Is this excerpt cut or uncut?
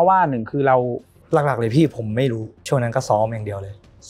cut